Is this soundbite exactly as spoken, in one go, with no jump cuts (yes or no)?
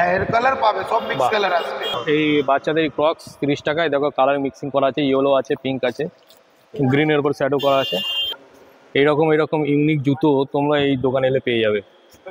no